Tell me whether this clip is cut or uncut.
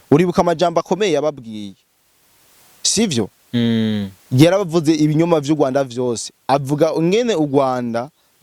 uncut